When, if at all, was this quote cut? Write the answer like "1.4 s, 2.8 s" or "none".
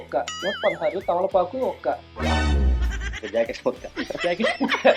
3.1 s